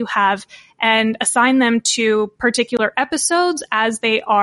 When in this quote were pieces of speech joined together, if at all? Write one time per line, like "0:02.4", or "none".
none